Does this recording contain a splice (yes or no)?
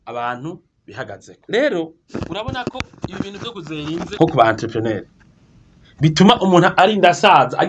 yes